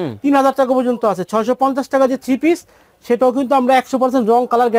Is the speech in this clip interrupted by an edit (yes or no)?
no